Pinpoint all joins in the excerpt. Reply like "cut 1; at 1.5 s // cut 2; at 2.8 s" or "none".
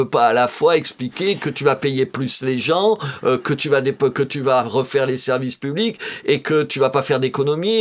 none